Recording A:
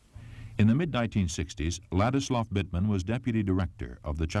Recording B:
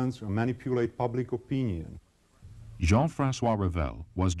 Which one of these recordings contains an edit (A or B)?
B